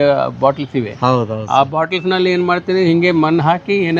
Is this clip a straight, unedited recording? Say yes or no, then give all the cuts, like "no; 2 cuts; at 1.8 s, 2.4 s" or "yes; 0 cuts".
yes; 0 cuts